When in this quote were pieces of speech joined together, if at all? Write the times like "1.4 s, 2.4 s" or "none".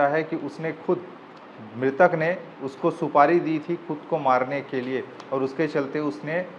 none